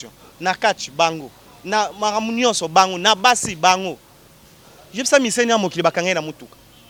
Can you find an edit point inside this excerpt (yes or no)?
no